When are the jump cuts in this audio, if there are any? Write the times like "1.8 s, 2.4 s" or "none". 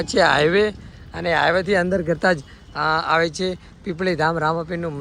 none